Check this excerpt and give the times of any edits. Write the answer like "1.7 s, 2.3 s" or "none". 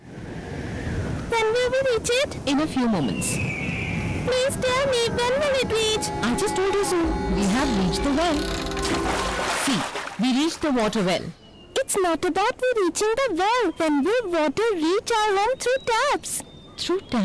1.8 s